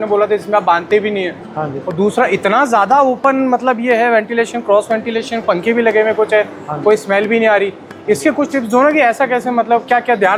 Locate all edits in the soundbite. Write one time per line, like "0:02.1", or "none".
none